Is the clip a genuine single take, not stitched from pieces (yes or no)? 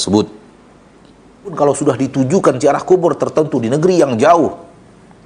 no